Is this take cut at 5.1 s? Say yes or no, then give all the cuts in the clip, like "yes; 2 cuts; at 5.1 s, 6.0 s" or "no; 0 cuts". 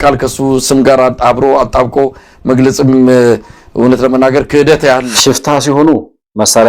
yes; 1 cut; at 5.1 s